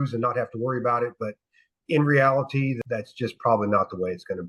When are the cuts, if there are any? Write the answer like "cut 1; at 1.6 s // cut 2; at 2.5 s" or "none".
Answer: cut 1; at 2.7 s